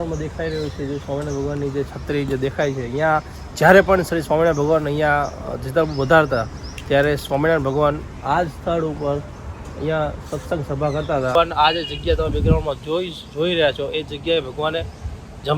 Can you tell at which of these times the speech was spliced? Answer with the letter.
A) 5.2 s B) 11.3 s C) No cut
B